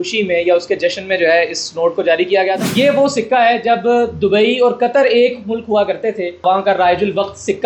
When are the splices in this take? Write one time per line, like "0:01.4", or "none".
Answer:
0:02.5
0:06.4

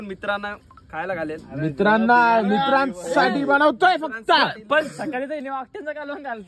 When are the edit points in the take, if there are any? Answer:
none

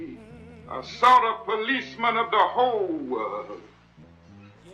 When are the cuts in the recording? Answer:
none

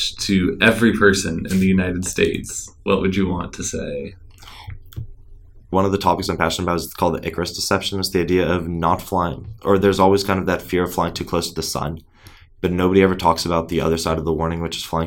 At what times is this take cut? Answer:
0:05.7

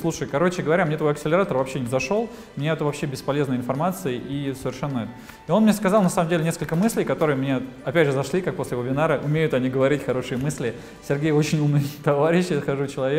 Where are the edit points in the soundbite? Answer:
none

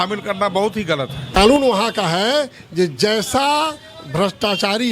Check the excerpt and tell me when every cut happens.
0:01.2

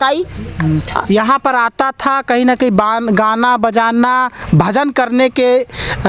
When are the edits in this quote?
none

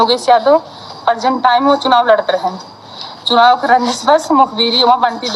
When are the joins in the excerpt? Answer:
none

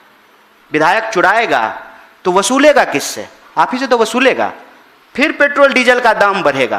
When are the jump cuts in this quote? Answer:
none

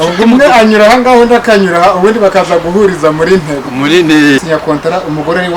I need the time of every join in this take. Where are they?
0:04.4

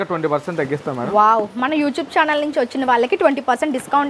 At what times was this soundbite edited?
none

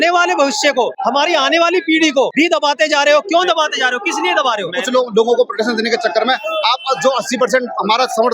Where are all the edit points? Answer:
0:00.9
0:02.3
0:04.7

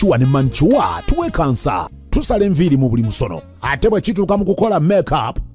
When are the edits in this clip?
none

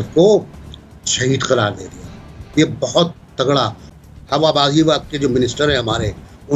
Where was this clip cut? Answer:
0:03.9

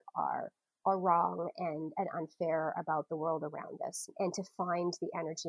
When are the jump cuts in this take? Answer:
0:04.1

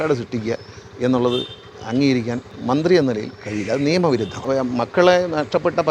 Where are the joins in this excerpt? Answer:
0:02.5
0:04.4

